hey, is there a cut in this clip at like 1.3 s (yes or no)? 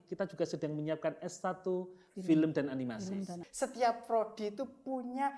no